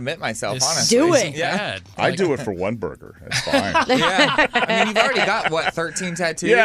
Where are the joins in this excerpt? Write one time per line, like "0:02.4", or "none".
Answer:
none